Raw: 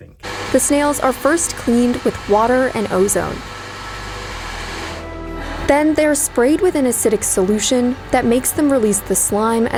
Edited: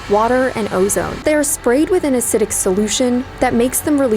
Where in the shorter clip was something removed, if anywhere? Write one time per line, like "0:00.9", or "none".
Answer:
0:01.2